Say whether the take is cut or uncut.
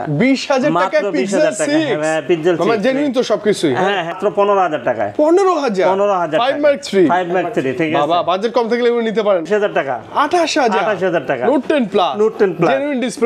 cut